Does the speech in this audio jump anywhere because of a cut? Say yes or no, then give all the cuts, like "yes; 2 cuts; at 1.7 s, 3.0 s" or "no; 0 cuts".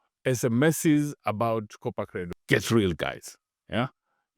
yes; 1 cut; at 2.3 s